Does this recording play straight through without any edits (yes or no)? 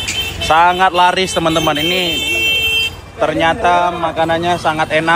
yes